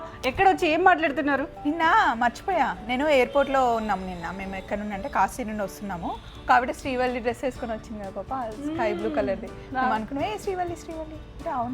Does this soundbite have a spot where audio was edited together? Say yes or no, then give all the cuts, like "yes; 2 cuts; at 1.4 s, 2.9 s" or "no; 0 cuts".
yes; 1 cut; at 1.5 s